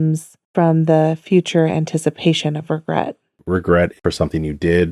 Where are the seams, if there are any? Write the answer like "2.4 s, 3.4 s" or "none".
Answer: 4.0 s